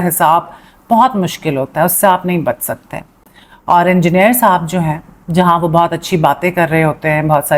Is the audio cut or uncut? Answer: uncut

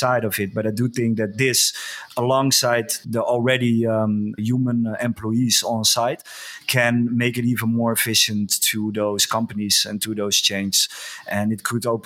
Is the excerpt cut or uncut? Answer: cut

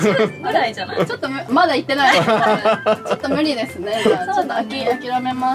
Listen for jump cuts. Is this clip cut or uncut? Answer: uncut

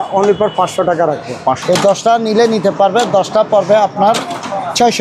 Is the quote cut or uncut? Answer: cut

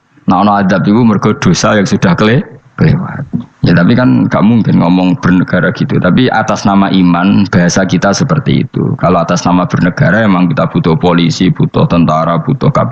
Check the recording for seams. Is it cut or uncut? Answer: uncut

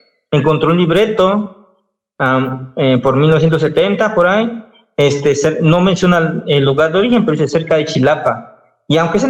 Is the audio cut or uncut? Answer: uncut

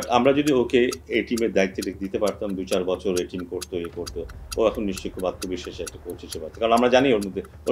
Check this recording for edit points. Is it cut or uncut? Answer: uncut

